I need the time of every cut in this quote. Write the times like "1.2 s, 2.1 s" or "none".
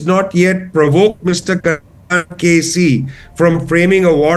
none